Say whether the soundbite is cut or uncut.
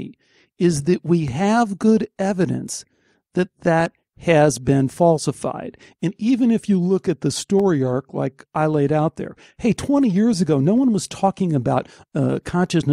uncut